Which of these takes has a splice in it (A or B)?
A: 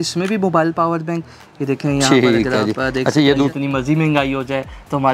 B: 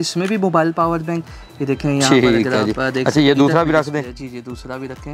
A